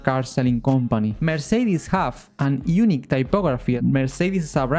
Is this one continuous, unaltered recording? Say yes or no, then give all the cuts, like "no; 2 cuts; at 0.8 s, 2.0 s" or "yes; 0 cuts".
no; 3 cuts; at 1.2 s, 2.2 s, 3.8 s